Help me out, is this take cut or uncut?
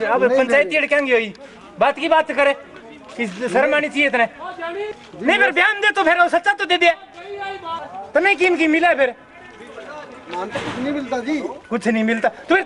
cut